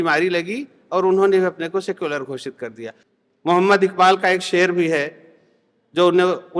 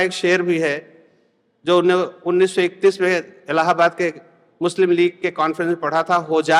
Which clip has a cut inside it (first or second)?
first